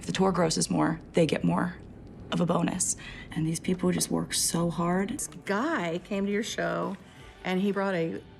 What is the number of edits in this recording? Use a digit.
1